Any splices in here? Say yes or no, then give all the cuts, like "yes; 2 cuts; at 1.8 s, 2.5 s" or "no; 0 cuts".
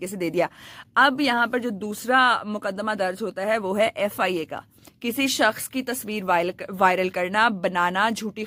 no; 0 cuts